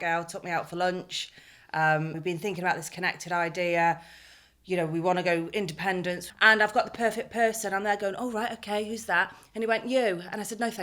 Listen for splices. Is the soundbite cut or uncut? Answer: cut